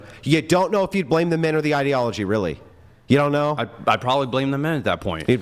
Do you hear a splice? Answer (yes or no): no